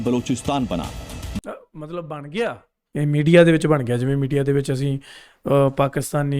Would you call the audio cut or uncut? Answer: cut